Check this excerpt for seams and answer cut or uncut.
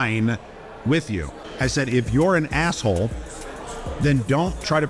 cut